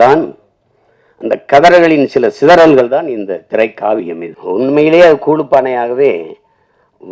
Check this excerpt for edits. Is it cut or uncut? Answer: cut